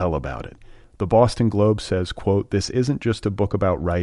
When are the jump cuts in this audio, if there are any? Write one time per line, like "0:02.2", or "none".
none